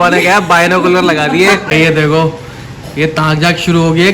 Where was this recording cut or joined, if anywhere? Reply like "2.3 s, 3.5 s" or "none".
1.6 s